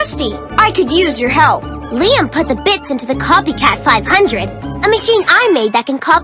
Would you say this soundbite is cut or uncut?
uncut